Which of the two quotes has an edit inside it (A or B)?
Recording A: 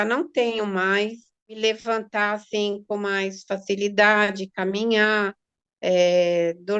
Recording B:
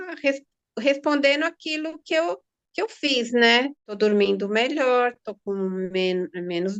A